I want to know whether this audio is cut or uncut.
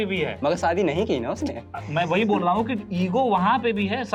uncut